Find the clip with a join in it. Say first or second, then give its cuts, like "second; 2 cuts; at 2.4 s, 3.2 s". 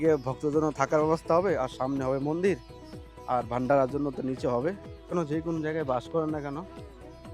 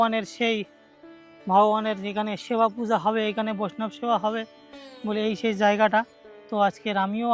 first; 1 cut; at 5.1 s